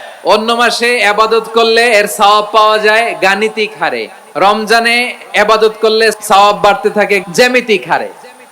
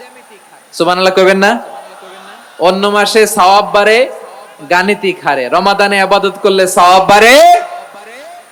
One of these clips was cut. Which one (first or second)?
first